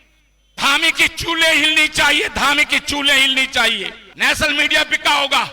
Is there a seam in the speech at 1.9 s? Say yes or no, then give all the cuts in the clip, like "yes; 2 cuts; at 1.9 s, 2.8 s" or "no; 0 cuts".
no; 1 cut; at 4.0 s